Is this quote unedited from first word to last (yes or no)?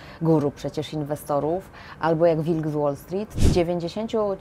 no